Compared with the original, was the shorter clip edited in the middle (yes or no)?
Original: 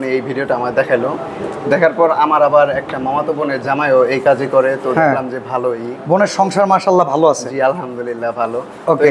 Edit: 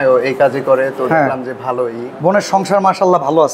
no